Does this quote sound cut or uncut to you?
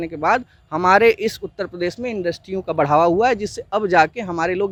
uncut